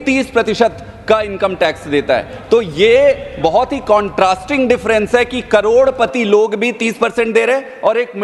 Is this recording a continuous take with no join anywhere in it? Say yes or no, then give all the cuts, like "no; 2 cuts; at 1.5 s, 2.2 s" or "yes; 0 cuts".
yes; 0 cuts